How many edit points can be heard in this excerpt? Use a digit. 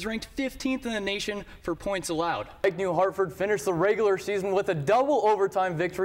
1